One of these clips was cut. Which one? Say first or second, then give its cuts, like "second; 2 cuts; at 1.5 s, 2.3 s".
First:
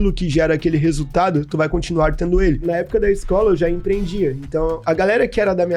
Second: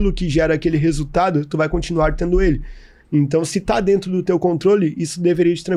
first; 1 cut; at 2.6 s